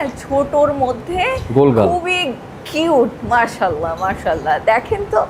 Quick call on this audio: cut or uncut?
uncut